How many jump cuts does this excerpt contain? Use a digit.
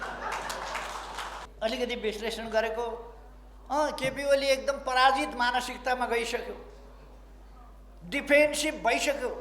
1